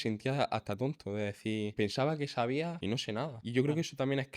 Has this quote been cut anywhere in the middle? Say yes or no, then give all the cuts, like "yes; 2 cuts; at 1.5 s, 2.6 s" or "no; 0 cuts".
yes; 2 cuts; at 1.7 s, 3.0 s